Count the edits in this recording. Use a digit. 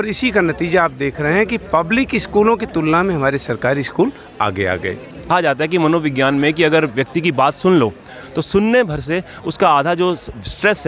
1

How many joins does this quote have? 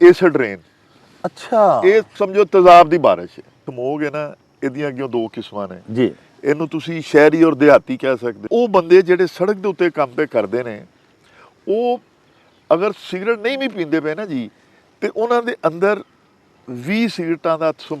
2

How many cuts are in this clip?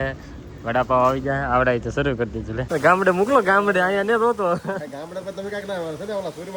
1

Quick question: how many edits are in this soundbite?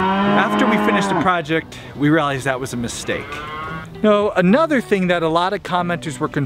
1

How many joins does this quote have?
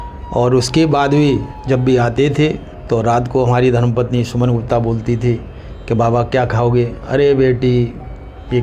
2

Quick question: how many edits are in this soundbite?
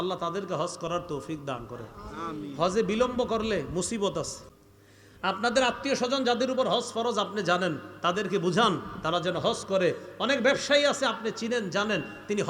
1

